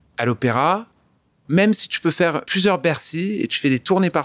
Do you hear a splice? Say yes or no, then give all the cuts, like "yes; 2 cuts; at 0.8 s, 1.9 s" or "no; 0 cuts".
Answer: yes; 2 cuts; at 1.4 s, 2.4 s